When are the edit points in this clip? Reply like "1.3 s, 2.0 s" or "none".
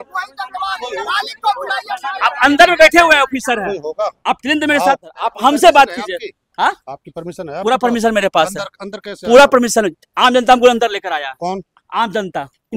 5.2 s